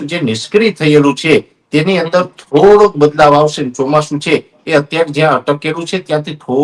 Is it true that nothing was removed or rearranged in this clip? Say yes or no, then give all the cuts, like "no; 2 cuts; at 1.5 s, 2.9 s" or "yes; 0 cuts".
yes; 0 cuts